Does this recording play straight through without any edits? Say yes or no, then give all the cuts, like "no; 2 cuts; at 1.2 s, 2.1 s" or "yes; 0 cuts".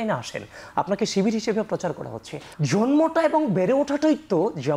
no; 1 cut; at 2.5 s